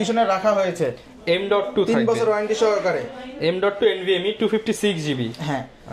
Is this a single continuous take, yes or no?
yes